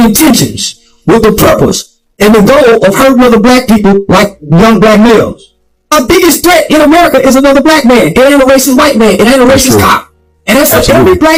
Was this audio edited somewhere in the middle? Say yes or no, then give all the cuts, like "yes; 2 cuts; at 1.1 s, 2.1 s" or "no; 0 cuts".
no; 0 cuts